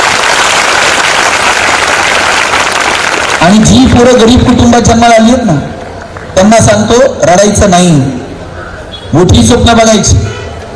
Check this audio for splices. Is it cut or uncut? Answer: uncut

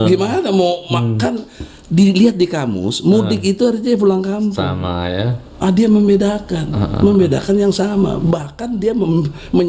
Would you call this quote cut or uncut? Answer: uncut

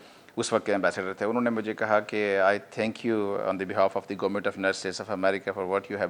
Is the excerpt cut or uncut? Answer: uncut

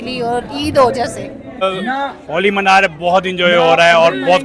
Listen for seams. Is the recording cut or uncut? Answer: cut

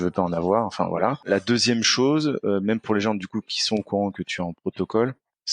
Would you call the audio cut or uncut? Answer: cut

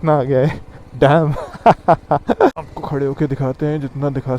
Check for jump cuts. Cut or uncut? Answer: cut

